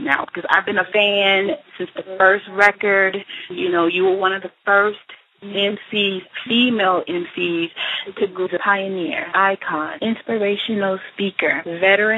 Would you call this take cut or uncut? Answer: uncut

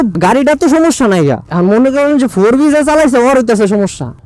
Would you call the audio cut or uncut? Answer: uncut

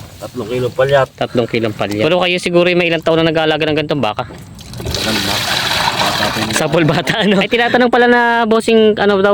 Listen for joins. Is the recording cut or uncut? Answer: cut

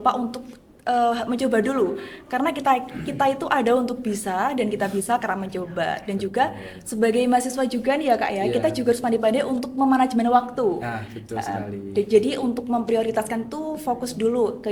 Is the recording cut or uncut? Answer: uncut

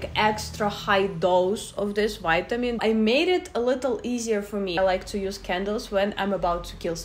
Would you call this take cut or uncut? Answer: cut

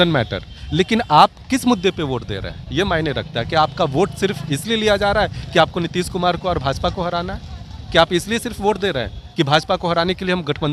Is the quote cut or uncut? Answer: uncut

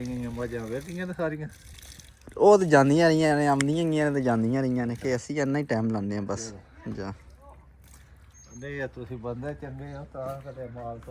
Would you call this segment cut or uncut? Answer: uncut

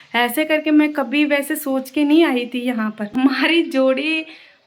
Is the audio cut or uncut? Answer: cut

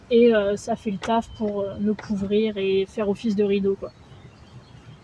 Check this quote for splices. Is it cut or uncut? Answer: uncut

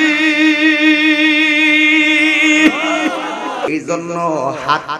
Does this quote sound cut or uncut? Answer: cut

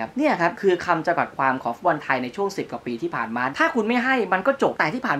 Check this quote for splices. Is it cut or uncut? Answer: cut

